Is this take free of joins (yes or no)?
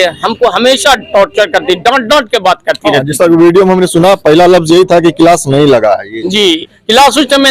yes